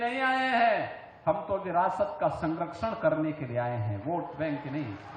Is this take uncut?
yes; 0 cuts

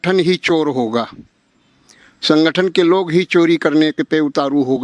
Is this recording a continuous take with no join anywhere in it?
yes; 0 cuts

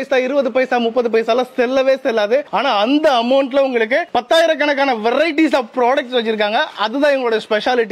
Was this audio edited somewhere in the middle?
no; 0 cuts

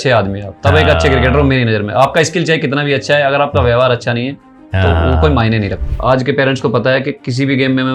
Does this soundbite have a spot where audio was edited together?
yes; 1 cut; at 5.7 s

